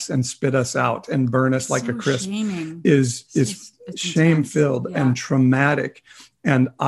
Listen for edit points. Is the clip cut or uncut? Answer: uncut